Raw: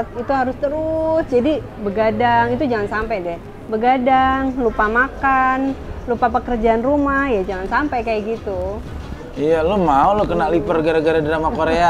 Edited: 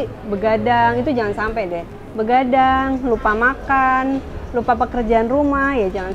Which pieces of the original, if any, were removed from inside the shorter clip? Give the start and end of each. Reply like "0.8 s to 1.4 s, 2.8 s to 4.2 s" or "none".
none